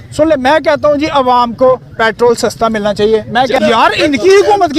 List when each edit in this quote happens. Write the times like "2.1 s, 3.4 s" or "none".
3.6 s